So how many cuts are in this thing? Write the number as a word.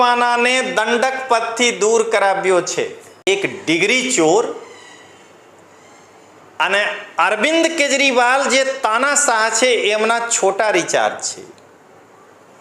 one